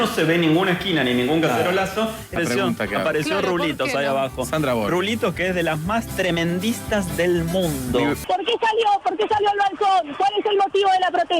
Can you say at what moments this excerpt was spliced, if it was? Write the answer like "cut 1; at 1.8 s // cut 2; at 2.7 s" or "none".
cut 1; at 8.2 s